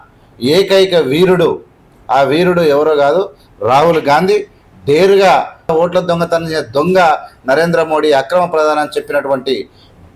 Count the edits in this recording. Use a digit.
1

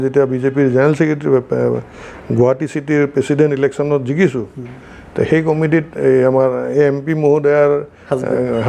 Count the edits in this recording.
0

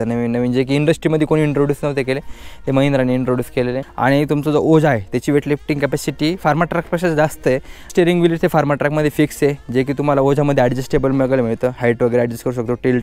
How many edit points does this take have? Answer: 2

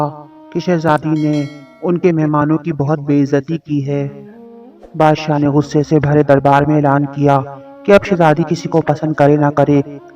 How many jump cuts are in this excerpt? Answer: 0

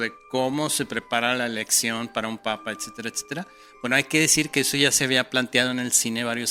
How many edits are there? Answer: 0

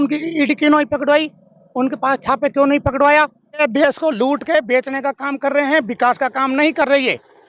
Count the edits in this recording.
1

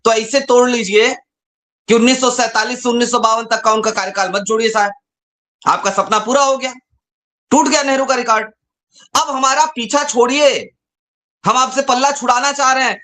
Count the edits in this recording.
0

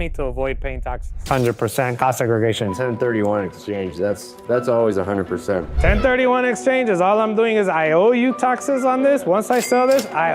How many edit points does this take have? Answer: 1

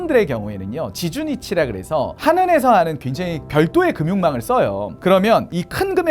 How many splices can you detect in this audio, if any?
1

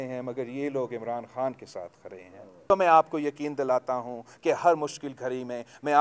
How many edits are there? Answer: 1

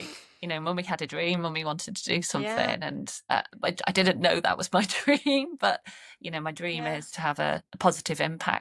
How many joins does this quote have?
2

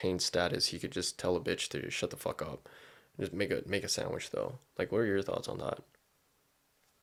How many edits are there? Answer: 0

